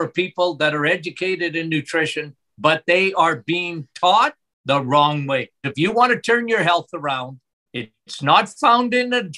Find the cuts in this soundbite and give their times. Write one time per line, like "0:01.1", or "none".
0:04.5
0:05.7